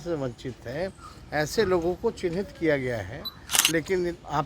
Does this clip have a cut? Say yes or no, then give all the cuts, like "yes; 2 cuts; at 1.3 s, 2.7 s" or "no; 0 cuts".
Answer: yes; 1 cut; at 3.5 s